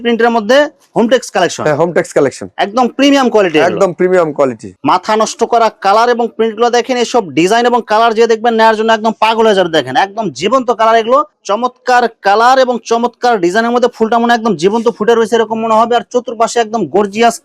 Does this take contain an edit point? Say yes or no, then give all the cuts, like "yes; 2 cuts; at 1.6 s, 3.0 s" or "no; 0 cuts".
yes; 2 cuts; at 4.7 s, 11.3 s